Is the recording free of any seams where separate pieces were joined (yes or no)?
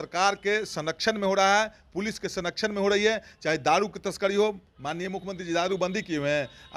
yes